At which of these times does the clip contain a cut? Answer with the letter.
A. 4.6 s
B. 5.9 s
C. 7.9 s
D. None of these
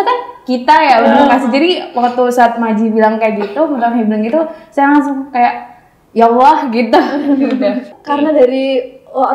C